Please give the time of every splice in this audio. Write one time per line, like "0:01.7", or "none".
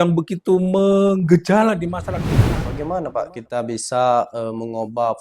0:02.6

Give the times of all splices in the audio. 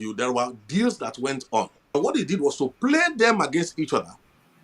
0:02.0

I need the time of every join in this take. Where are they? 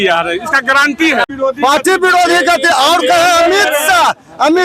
0:01.3

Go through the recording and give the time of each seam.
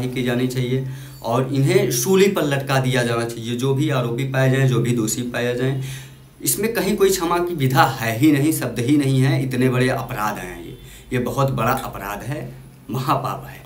none

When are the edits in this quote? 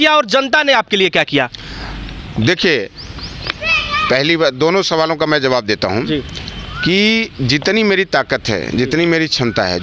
none

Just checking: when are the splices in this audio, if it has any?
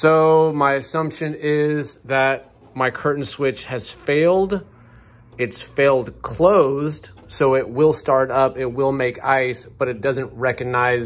none

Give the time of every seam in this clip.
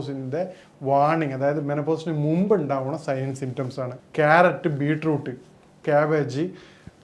0:04.0

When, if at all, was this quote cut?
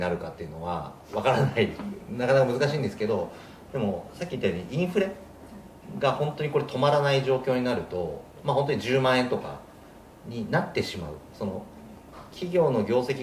0:01.0

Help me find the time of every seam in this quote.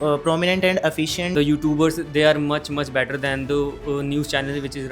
0:01.3

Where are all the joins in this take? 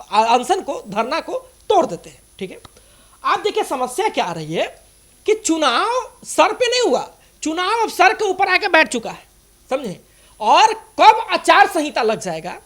none

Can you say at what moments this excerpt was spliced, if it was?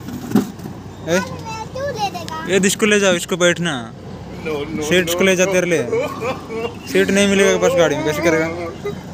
none

